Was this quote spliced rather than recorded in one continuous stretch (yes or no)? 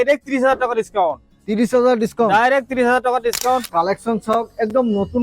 yes